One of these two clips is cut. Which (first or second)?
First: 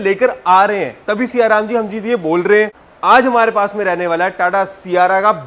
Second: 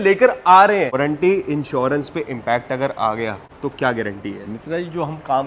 second